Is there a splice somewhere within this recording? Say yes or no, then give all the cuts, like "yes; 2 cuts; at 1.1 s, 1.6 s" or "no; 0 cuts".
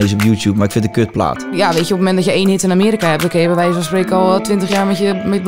yes; 1 cut; at 1.4 s